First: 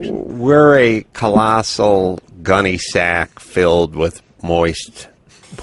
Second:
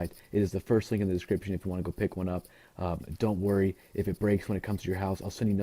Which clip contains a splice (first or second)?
first